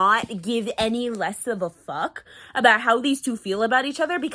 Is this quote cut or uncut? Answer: uncut